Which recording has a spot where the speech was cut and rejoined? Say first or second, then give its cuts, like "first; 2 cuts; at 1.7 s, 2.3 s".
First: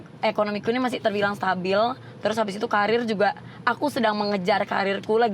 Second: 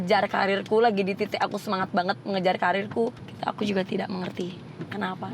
second; 1 cut; at 3.2 s